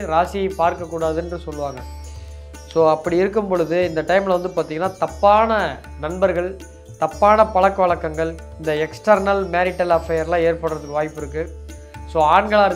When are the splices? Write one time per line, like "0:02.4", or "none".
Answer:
none